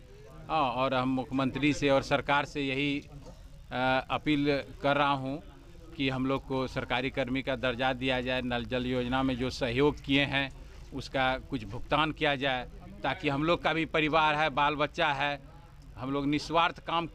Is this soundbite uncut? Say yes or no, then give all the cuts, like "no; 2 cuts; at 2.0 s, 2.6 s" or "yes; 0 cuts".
yes; 0 cuts